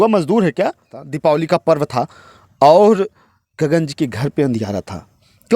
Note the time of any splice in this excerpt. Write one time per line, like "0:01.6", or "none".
0:01.0